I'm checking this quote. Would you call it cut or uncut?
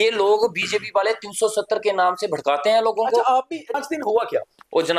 cut